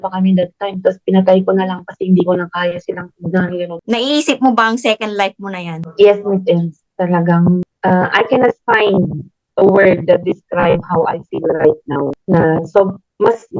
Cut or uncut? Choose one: uncut